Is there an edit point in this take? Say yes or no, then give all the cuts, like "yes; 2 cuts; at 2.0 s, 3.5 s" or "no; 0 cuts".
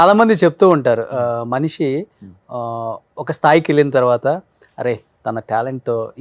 no; 0 cuts